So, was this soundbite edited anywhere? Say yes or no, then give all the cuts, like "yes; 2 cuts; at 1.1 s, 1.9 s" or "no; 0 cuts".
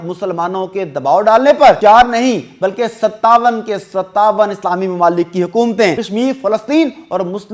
yes; 2 cuts; at 1.8 s, 6.0 s